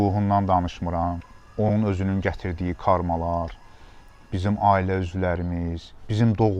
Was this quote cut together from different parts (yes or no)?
no